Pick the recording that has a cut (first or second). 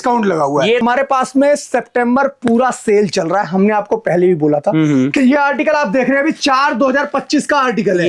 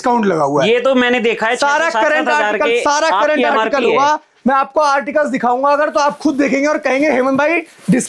first